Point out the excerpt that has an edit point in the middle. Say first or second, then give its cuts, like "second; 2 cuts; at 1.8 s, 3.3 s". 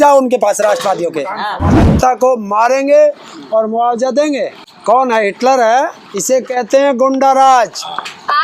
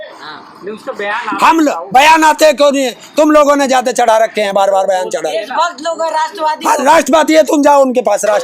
first; 3 cuts; at 1.9 s, 4.6 s, 6.1 s